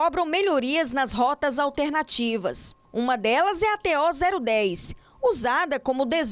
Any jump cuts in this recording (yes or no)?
no